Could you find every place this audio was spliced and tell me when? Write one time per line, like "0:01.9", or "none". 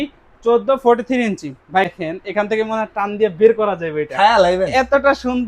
0:01.9